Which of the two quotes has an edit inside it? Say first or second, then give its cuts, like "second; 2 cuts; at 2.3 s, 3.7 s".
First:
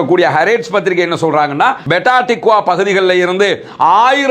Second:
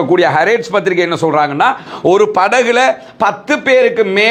first; 1 cut; at 1.9 s